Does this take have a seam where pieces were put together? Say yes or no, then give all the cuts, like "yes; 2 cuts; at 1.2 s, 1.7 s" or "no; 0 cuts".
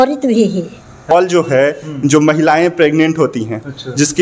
yes; 1 cut; at 1.1 s